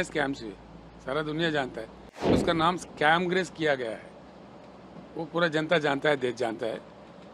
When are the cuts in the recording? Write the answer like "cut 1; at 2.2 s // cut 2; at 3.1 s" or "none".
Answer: cut 1; at 2.4 s